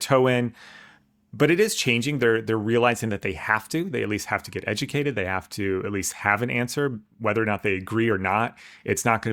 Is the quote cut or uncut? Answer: uncut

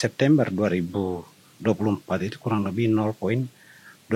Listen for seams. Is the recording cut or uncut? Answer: uncut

